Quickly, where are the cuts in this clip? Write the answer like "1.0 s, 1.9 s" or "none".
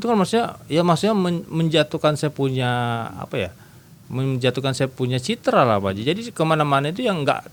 none